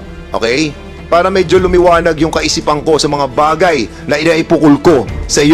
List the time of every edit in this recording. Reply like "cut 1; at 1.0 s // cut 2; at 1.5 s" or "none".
none